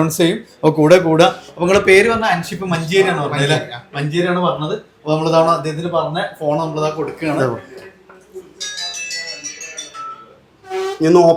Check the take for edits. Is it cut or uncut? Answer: uncut